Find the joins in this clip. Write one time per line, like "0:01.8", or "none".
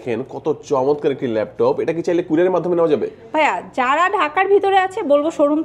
none